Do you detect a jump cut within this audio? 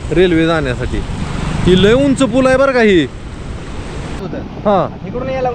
yes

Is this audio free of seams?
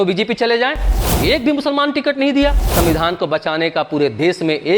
no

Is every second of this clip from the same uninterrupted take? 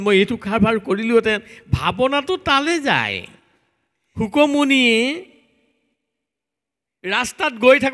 no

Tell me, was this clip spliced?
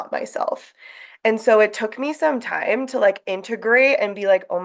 no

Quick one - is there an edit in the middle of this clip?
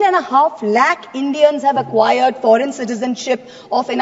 no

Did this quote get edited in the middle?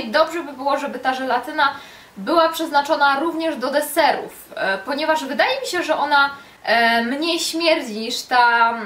yes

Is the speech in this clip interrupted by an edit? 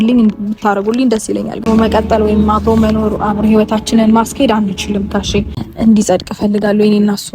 yes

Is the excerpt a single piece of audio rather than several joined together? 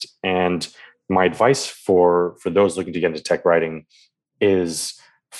yes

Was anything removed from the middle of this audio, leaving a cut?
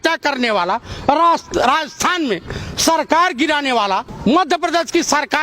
yes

